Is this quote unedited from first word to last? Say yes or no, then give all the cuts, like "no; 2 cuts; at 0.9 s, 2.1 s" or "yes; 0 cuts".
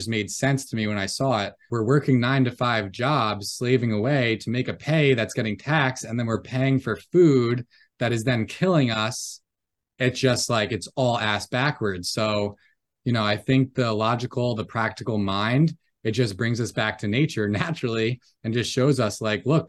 no; 1 cut; at 1.7 s